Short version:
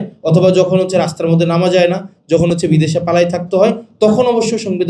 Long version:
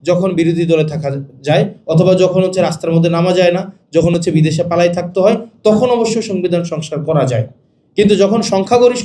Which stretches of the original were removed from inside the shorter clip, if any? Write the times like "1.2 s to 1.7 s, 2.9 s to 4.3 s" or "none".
none